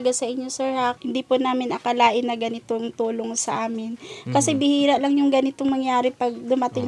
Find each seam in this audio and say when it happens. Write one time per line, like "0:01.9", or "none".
0:01.0